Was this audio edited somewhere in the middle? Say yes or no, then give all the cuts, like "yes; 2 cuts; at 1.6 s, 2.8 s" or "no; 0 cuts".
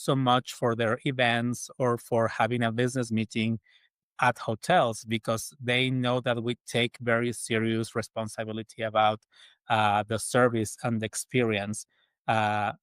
no; 0 cuts